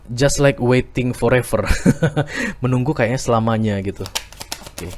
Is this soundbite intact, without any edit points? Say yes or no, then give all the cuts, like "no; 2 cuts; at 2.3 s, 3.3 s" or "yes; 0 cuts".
yes; 0 cuts